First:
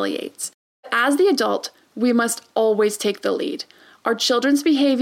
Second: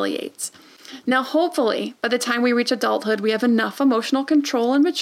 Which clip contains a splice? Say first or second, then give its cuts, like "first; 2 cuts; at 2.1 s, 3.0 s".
first; 1 cut; at 0.9 s